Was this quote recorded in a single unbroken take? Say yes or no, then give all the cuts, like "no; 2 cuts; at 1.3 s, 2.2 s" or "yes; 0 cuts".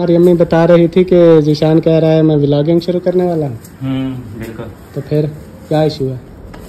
yes; 0 cuts